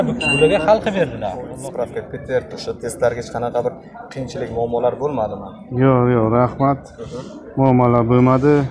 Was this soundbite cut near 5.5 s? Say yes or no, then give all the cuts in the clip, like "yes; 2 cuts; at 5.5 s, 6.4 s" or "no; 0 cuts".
no; 1 cut; at 1.5 s